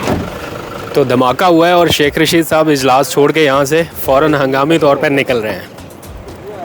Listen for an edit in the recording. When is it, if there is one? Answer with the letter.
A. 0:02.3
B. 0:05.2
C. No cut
C